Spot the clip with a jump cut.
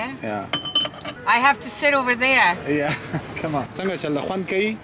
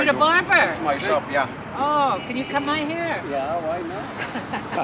first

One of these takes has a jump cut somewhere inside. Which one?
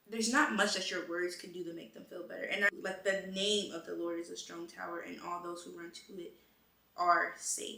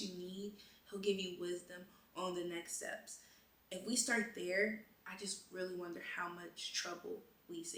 first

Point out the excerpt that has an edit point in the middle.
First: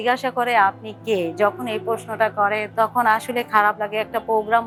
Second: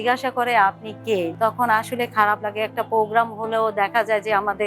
second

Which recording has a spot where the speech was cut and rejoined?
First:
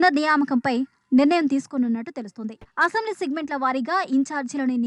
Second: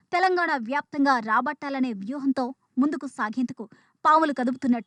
first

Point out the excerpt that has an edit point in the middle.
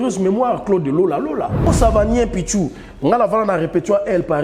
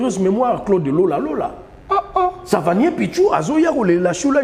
first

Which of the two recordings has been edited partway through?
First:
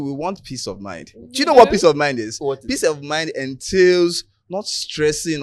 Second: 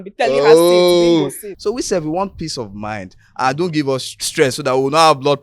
second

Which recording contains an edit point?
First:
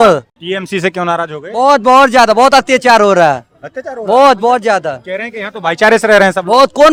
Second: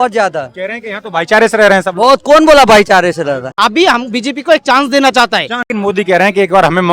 second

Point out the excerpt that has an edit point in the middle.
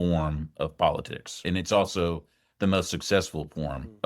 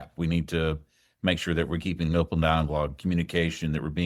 first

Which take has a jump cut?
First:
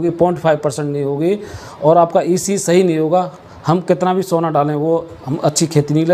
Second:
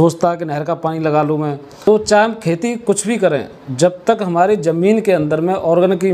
second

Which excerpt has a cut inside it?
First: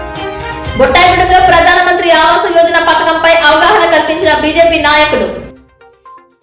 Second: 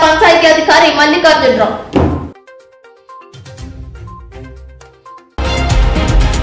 second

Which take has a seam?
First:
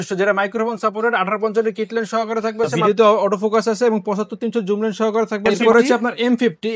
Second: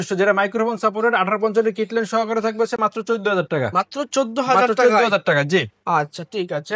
first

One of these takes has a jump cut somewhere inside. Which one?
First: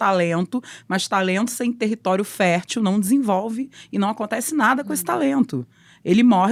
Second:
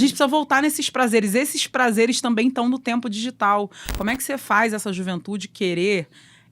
second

